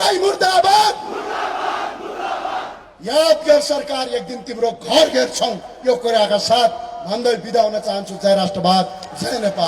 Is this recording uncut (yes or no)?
yes